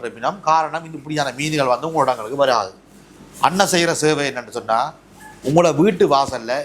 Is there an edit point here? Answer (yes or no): no